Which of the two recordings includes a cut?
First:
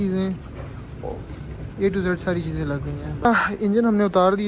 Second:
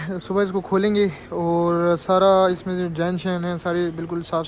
first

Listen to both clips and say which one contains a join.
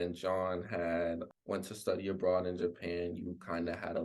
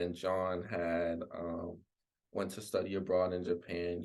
first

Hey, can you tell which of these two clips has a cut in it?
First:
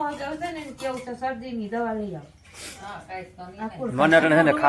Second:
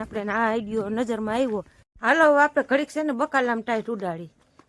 second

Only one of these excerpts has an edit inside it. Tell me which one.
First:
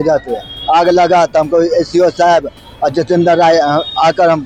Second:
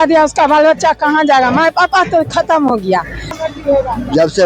second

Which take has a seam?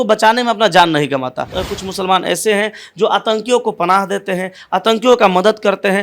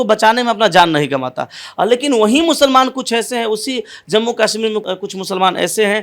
first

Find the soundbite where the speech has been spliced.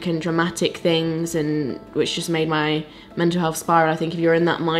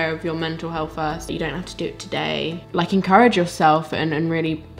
second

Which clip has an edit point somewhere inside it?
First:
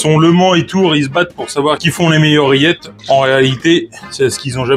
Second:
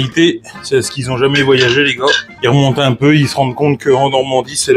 second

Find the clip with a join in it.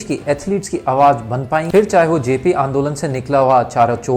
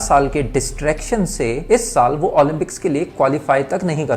first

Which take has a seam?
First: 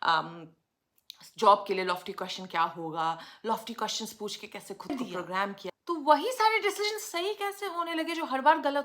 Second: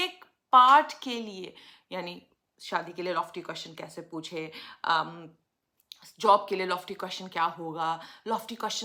first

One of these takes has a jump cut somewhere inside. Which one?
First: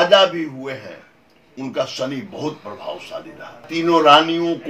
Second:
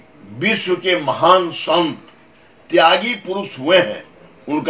first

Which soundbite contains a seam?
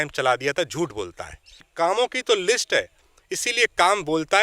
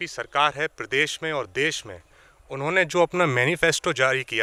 first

